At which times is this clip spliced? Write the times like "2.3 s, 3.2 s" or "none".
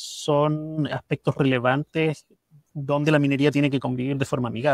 none